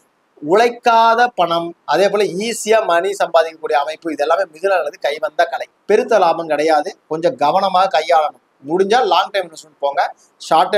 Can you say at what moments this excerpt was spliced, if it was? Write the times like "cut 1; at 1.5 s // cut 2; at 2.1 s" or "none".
cut 1; at 5.7 s